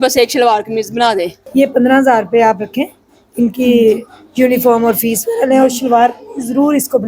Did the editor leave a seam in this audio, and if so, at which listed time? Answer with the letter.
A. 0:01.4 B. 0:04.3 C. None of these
A